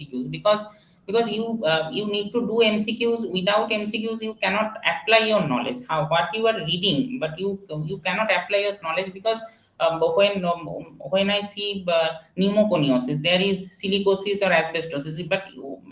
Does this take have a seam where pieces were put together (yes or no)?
no